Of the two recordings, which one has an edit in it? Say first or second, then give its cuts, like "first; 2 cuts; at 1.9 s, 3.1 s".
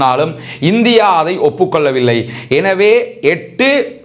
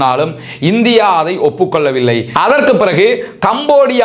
second; 1 cut; at 2.3 s